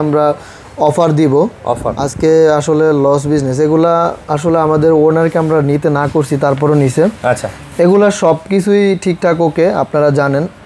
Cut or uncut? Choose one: uncut